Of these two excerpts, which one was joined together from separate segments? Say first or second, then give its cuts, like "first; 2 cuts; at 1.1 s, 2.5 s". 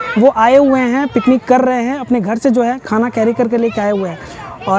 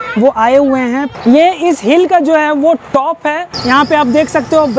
second; 2 cuts; at 1.1 s, 3.5 s